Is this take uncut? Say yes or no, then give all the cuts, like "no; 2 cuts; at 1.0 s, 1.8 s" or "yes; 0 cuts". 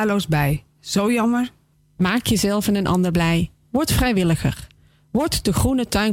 yes; 0 cuts